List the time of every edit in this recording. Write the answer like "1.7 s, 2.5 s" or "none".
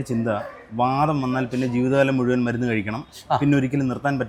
none